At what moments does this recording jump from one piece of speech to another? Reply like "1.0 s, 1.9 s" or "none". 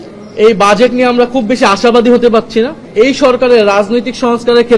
2.8 s